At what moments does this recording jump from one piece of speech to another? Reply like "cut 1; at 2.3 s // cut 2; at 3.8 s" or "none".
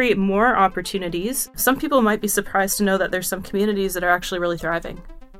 cut 1; at 1.4 s